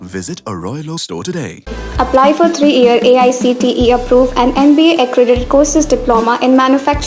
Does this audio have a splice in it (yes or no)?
no